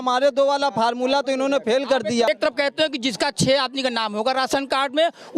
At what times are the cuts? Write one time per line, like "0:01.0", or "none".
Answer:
0:02.3